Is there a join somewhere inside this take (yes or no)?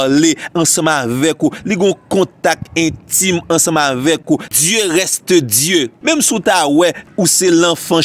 yes